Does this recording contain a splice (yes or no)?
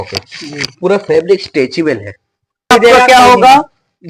yes